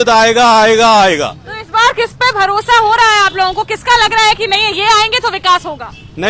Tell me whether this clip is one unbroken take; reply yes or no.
yes